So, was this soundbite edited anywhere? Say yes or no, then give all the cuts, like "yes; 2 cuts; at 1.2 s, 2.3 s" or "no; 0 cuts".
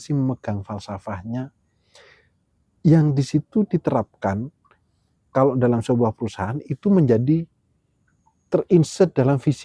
no; 0 cuts